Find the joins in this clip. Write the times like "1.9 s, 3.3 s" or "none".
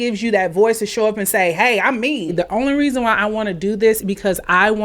2.3 s